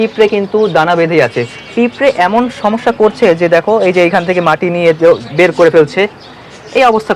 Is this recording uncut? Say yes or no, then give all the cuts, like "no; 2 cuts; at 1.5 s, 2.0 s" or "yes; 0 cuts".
yes; 0 cuts